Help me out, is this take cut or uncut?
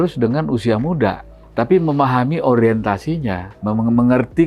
cut